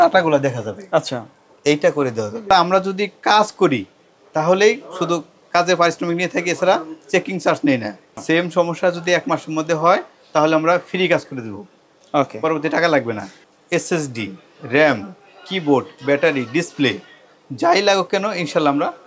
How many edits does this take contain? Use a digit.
3